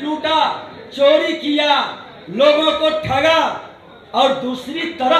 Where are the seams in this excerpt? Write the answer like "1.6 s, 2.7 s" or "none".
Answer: none